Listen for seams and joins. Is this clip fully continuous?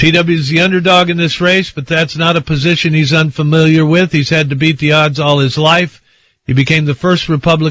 no; 1 cut; at 1.3 s

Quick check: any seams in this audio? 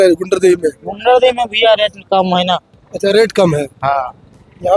no; 0 cuts

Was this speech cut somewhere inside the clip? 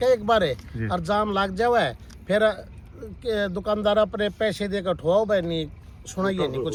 no; 0 cuts

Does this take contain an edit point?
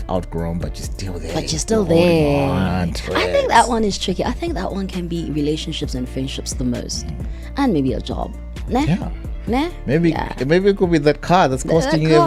no; 0 cuts

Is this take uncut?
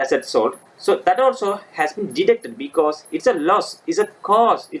yes; 0 cuts

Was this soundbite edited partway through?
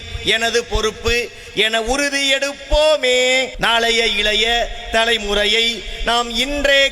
yes; 1 cut; at 3.5 s

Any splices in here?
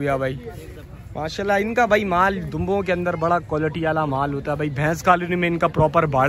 no; 0 cuts

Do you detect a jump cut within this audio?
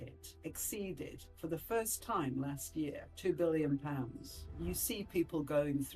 yes; 1 cut; at 4.4 s

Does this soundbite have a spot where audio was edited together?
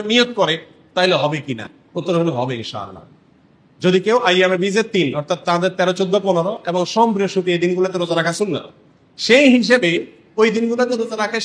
no; 0 cuts

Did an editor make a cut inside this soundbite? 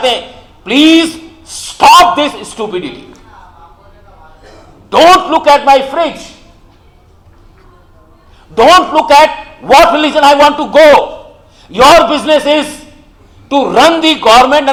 no; 0 cuts

